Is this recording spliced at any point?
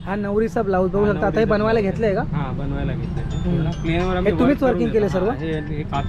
no; 0 cuts

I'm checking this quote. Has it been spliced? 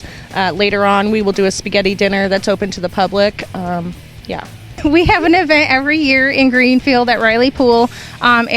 yes; 1 cut; at 4.7 s

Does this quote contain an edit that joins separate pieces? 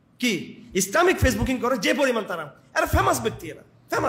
no; 0 cuts

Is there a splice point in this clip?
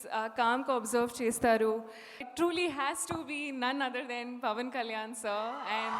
yes; 1 cut; at 2.2 s

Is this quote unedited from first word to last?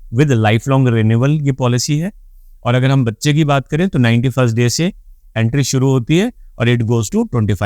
yes; 0 cuts

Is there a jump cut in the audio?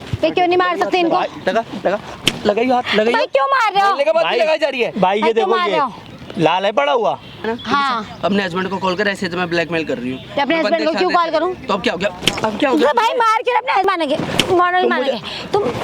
yes; 2 cuts; at 7.5 s, 13.8 s

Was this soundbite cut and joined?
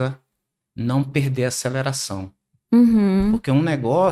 no; 0 cuts

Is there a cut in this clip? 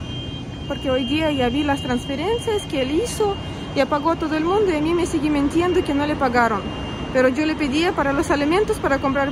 no; 0 cuts

